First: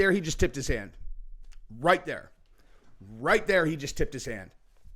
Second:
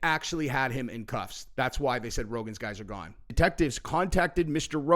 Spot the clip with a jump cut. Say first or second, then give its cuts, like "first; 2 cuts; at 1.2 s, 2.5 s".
second; 1 cut; at 3.3 s